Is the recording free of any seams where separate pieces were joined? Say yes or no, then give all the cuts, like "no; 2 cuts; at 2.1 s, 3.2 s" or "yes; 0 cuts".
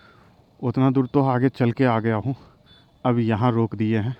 yes; 0 cuts